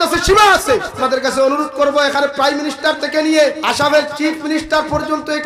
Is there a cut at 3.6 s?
yes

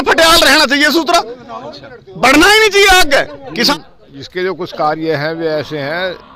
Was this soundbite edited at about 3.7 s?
yes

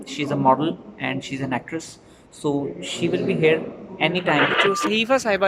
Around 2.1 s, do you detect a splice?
no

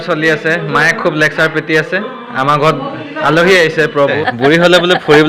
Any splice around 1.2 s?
no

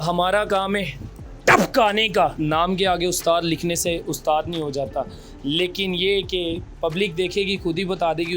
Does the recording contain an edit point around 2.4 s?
yes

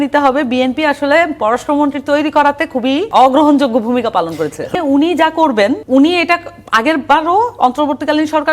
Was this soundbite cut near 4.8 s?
yes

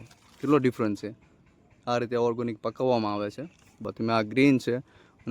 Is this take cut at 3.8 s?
yes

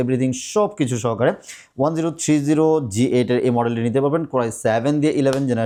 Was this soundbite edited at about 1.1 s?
no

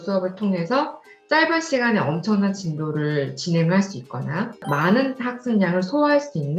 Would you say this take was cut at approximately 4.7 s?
yes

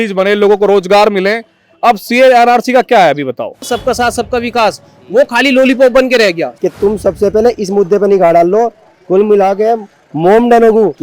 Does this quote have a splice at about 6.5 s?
yes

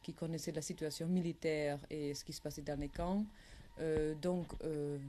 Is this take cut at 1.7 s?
no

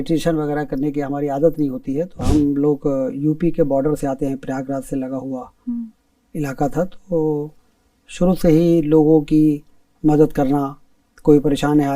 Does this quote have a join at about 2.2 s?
yes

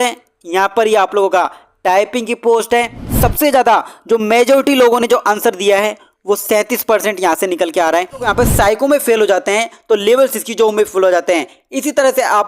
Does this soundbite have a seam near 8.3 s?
yes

